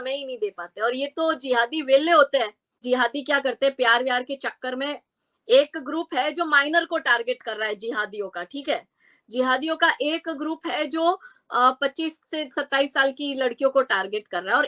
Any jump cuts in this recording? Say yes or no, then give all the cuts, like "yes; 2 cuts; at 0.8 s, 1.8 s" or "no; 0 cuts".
yes; 1 cut; at 2.8 s